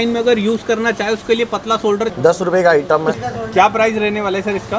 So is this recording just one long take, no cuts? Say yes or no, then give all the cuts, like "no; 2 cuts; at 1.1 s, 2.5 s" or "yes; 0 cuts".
no; 2 cuts; at 2.1 s, 3.2 s